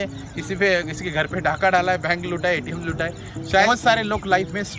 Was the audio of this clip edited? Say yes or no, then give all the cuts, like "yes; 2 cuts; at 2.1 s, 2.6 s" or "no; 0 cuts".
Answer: yes; 1 cut; at 3.7 s